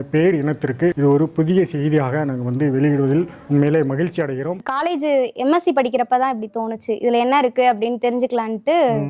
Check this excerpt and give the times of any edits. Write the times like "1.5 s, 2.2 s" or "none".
4.7 s